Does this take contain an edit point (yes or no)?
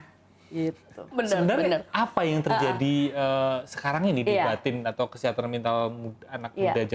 yes